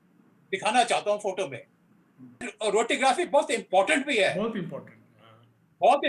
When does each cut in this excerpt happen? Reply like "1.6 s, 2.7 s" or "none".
2.5 s